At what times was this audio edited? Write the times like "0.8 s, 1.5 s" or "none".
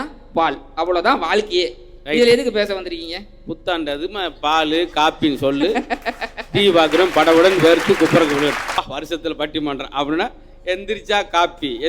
8.8 s